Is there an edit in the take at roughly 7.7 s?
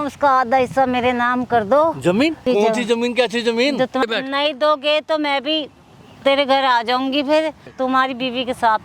yes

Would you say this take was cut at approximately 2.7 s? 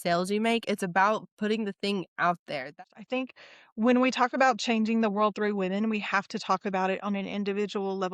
yes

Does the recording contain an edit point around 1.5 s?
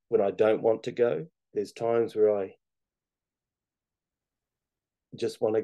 yes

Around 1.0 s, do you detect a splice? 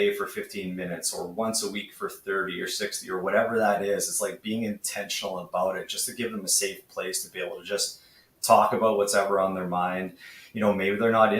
no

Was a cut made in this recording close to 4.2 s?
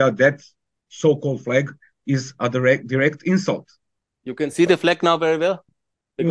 yes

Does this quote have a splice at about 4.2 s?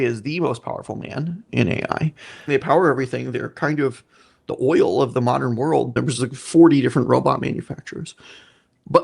no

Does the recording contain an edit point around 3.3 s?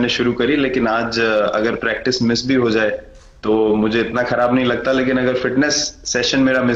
no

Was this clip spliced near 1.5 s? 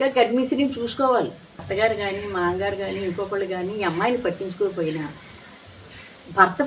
yes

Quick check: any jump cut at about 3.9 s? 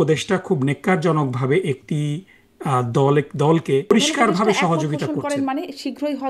yes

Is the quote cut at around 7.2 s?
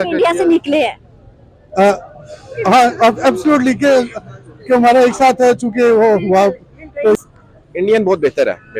yes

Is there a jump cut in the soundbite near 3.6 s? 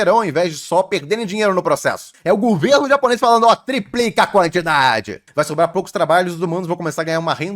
no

